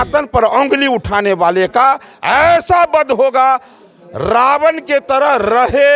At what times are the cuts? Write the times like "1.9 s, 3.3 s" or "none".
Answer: none